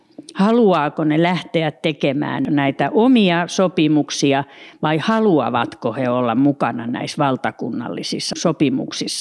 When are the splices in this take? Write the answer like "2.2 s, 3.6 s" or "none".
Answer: 2.5 s, 8.3 s